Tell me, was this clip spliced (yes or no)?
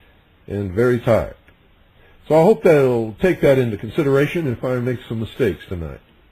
no